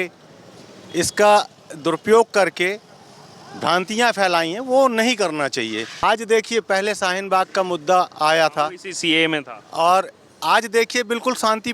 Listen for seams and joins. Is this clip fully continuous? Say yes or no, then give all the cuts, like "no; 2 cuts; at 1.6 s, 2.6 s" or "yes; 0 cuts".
no; 1 cut; at 5.9 s